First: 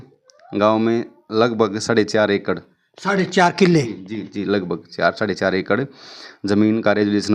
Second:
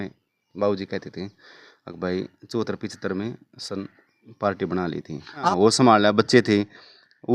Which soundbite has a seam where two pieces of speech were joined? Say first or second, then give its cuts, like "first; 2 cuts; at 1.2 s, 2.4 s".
second; 1 cut; at 5.5 s